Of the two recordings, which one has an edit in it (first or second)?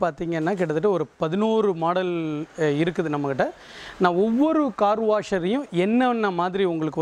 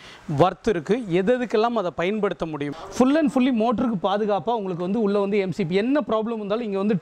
second